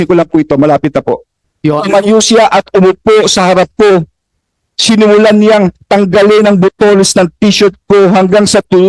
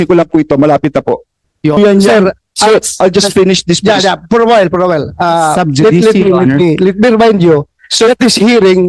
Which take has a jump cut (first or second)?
second